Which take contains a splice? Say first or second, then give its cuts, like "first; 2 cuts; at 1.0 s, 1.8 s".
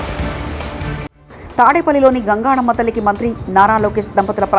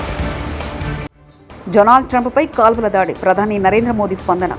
second; 1 cut; at 1.2 s